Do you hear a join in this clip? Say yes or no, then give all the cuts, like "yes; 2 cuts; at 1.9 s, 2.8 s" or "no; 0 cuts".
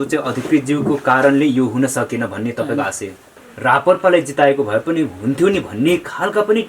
yes; 1 cut; at 3.5 s